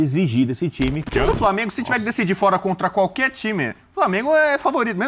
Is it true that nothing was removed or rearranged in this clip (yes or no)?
no